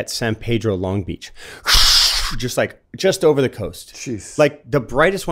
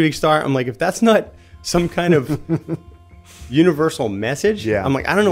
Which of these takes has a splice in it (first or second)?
first